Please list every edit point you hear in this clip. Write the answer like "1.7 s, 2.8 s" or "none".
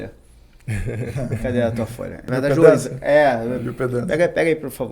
2.2 s